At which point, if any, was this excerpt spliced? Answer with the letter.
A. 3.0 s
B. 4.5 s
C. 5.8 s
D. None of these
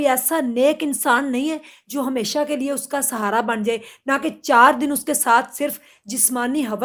D